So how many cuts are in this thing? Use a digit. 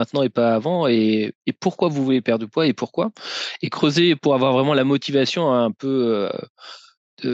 0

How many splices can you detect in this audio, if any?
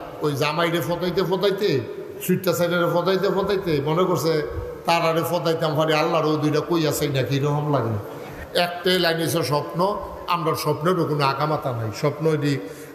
1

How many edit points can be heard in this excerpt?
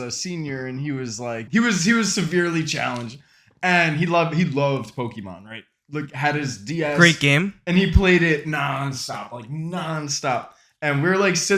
1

